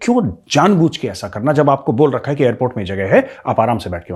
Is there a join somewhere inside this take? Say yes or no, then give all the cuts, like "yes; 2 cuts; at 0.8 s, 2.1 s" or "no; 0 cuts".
no; 0 cuts